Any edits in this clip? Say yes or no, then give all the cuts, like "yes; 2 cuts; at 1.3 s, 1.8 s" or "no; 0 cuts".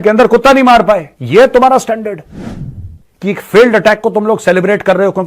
yes; 1 cut; at 1.1 s